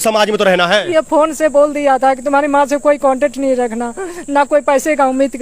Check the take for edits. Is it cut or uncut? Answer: uncut